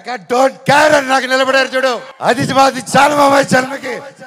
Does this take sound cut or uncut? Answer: cut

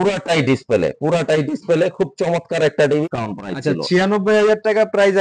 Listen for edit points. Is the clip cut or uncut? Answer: cut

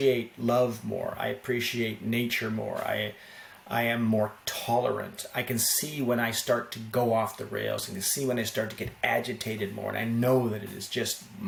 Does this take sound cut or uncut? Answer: uncut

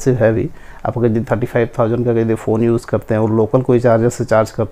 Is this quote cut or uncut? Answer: uncut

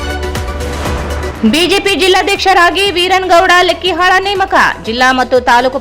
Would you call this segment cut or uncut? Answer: cut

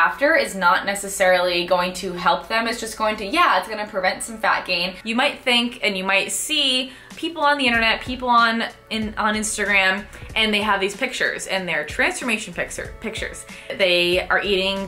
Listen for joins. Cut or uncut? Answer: cut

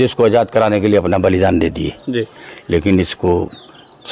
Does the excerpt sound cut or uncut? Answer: uncut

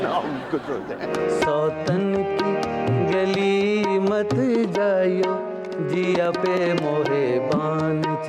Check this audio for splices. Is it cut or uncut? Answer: cut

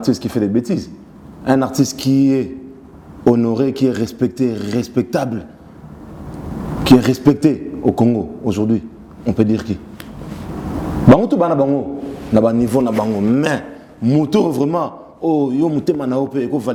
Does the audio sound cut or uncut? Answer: uncut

